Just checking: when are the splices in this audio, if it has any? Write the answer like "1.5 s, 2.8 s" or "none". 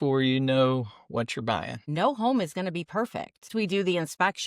1.8 s, 3.5 s